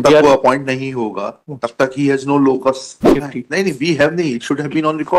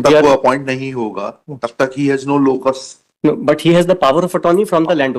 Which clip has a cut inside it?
first; 1 cut; at 3.0 s

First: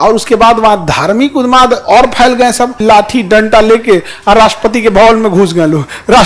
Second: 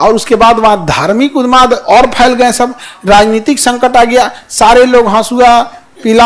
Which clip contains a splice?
first; 1 cut; at 2.8 s

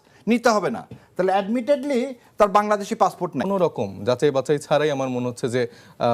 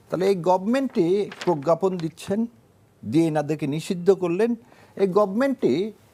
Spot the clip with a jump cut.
first; 1 cut; at 3.5 s

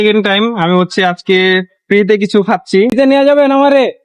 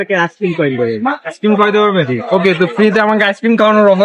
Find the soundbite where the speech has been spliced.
first; 1 cut; at 2.9 s

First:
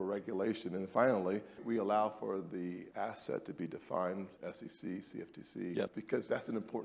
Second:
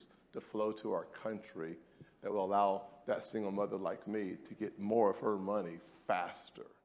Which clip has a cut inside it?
first; 4 cuts; at 1.6 s, 2.8 s, 4.3 s, 6.0 s

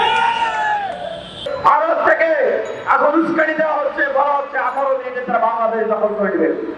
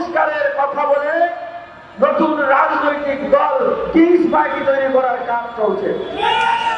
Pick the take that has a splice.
first; 1 cut; at 1.5 s

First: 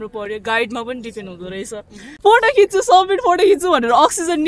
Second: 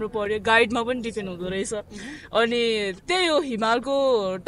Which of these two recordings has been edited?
first; 1 cut; at 2.2 s

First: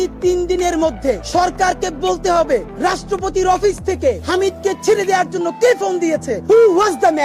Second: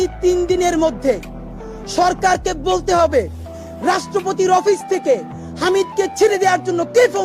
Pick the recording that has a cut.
first; 4 cuts; at 1.2 s, 2.7 s, 4.2 s, 6.3 s

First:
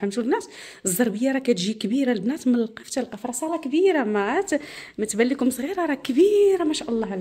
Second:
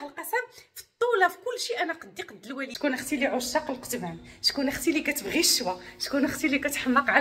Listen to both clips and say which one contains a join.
second; 1 cut; at 2.7 s

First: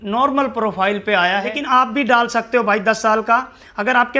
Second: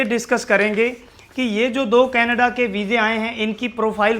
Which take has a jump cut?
first; 1 cut; at 1.5 s

